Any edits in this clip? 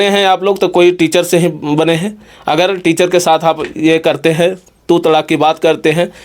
no; 0 cuts

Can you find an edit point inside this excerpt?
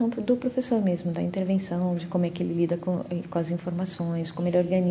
no; 0 cuts

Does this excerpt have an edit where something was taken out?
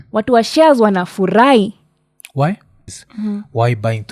yes; 1 cut; at 3.0 s

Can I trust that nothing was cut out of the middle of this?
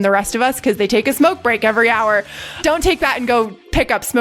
no; 1 cut; at 2.2 s

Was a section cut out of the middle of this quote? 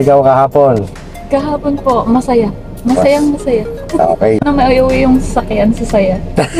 no; 0 cuts

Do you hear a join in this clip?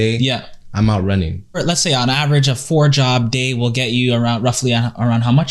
yes; 1 cut; at 1.6 s

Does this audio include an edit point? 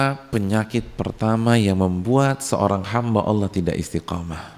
no; 0 cuts

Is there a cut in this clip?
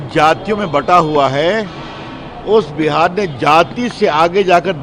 no; 0 cuts

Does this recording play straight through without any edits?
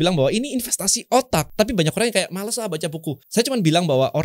no; 2 cuts; at 1.5 s, 3.2 s

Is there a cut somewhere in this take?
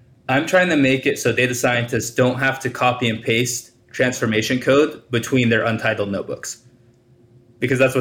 no; 0 cuts

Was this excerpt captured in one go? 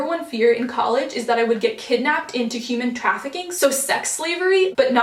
yes; 0 cuts

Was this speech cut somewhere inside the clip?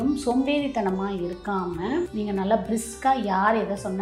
yes; 1 cut; at 2.1 s

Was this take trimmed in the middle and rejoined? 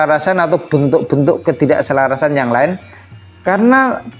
no; 0 cuts

